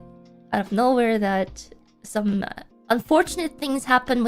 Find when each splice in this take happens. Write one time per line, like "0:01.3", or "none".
0:02.7